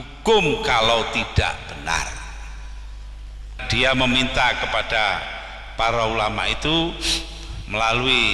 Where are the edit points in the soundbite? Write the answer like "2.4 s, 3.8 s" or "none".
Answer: 3.6 s